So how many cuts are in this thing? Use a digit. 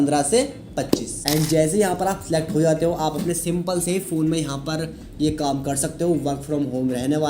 1